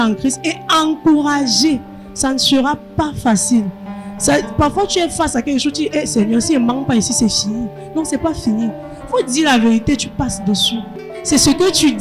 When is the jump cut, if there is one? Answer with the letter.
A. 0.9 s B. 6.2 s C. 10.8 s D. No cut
C